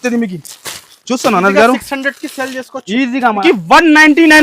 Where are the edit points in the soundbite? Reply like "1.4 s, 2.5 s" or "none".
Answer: 3.4 s